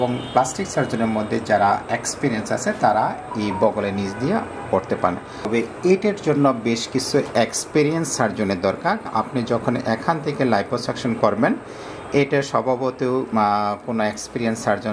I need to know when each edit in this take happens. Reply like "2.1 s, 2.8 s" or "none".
5.5 s, 9.1 s